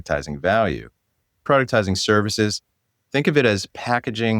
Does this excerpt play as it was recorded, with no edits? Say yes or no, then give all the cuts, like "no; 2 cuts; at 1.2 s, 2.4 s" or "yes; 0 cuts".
no; 1 cut; at 1.4 s